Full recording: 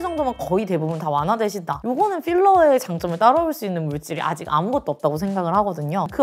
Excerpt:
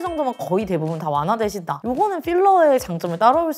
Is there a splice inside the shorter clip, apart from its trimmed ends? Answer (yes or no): no